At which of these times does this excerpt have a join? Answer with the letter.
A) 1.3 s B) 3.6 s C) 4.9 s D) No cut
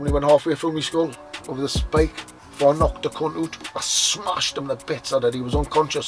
B